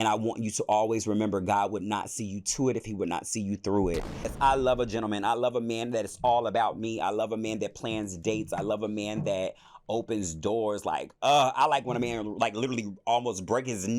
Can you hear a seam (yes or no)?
yes